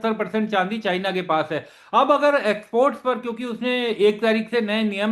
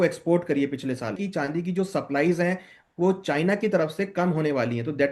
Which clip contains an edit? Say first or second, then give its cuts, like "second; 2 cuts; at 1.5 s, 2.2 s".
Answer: second; 1 cut; at 1.2 s